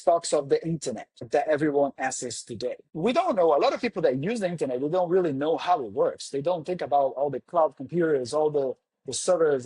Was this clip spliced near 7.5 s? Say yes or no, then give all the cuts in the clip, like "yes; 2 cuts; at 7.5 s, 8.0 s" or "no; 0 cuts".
no; 2 cuts; at 1.3 s, 2.9 s